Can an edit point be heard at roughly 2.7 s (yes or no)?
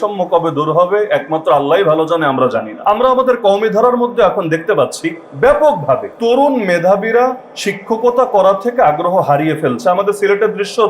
yes